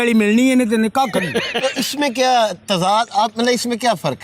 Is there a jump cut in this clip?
no; 0 cuts

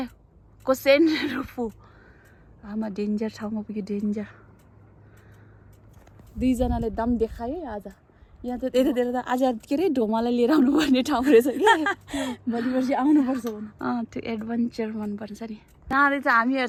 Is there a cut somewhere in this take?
no; 0 cuts

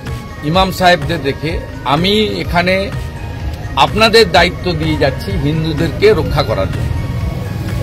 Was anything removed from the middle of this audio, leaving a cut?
no; 0 cuts

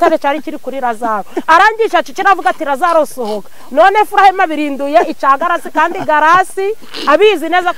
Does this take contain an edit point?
no; 0 cuts

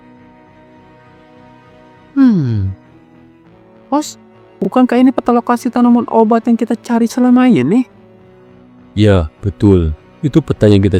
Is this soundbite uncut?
yes; 0 cuts

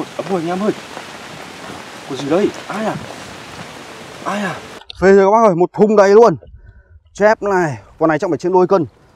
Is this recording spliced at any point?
yes; 1 cut; at 4.8 s

